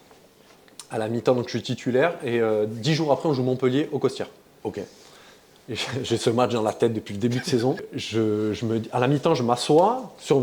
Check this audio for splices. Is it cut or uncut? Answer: cut